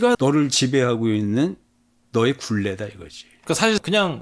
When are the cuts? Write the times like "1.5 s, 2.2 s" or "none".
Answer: none